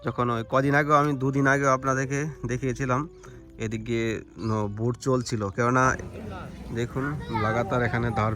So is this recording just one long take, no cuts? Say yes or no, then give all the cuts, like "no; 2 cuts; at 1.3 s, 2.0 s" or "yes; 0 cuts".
no; 1 cut; at 6.1 s